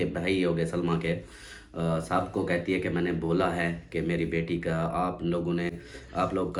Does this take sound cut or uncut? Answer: uncut